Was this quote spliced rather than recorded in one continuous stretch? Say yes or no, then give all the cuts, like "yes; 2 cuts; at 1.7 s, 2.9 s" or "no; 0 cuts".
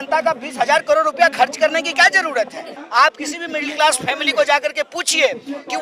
yes; 1 cut; at 2.7 s